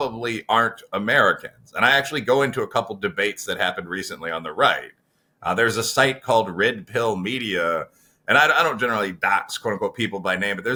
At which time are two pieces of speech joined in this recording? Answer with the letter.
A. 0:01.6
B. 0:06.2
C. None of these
C